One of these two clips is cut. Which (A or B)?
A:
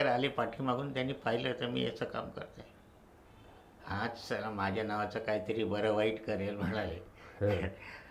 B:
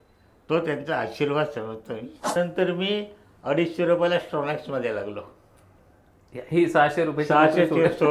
B